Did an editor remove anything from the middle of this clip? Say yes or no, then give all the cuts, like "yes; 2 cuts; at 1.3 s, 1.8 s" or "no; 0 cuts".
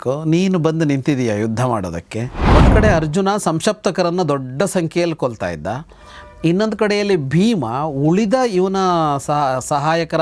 yes; 1 cut; at 2.4 s